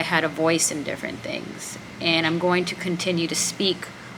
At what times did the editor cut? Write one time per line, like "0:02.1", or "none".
none